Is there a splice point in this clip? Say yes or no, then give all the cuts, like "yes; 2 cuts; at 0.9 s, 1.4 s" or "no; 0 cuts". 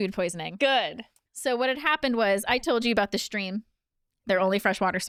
no; 0 cuts